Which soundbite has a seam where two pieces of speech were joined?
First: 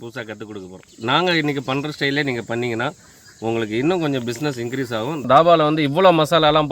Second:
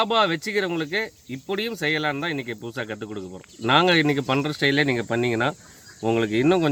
first; 1 cut; at 5.2 s

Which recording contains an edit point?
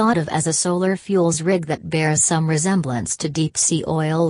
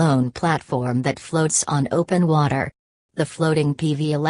second; 1 cut; at 3.2 s

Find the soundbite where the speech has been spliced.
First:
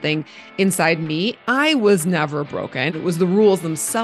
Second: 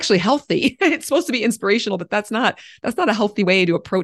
first; 2 cuts; at 1.4 s, 2.9 s

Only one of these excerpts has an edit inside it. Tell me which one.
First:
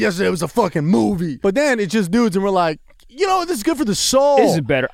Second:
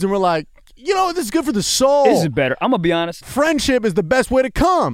first; 1 cut; at 1.3 s

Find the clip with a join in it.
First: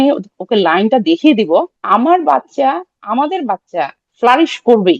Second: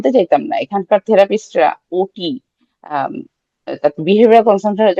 first; 2 cuts; at 1.8 s, 4.1 s

